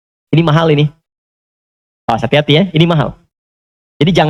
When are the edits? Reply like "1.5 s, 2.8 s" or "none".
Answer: none